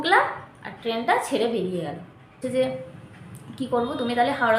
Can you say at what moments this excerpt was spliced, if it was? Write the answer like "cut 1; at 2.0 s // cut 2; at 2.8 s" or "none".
cut 1; at 2.4 s